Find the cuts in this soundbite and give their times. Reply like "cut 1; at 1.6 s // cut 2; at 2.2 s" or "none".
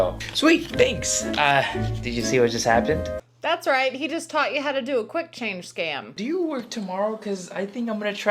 cut 1; at 6.2 s